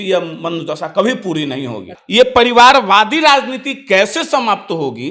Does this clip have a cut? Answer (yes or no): yes